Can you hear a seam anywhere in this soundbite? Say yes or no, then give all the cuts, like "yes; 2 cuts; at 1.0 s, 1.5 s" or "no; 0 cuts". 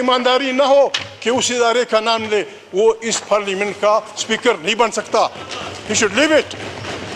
no; 0 cuts